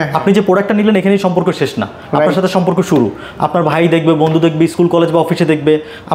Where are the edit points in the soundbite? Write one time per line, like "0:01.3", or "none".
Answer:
none

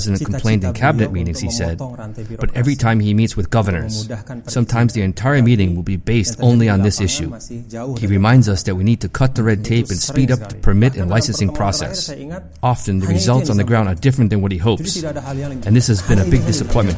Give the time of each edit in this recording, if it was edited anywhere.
none

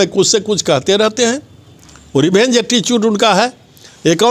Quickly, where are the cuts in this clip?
none

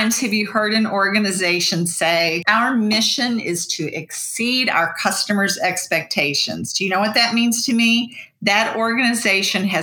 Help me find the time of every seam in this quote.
0:02.4

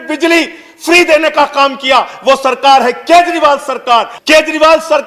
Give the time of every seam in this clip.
0:04.1

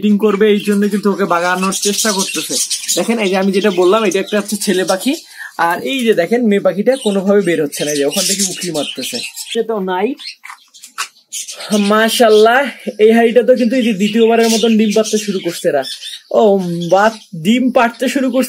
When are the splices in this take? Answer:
0:09.5

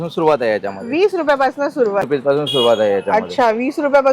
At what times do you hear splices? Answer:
0:02.1

